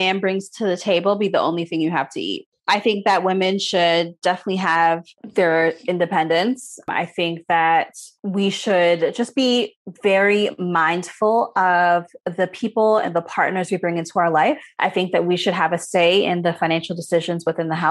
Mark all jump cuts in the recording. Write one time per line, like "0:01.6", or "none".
0:05.2
0:14.7